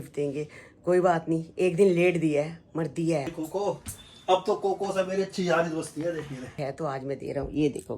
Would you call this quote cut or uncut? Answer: cut